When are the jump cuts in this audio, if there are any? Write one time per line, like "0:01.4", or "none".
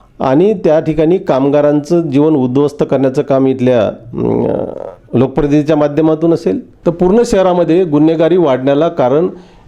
0:06.7